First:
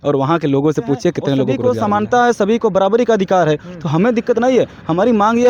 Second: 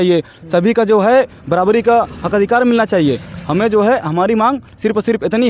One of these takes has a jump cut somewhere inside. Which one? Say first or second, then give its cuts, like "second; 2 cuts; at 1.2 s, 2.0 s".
first; 1 cut; at 1.6 s